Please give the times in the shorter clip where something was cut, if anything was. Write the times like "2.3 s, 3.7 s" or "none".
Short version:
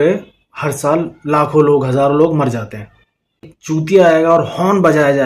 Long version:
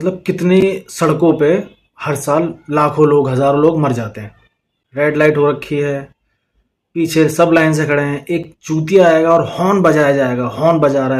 3.5 s